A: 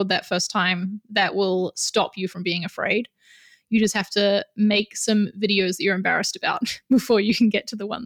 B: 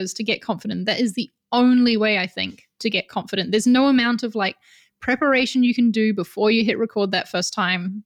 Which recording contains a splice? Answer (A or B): B